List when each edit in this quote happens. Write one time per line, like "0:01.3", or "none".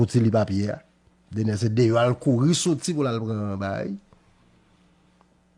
none